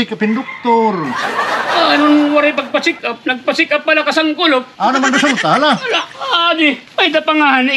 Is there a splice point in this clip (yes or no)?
yes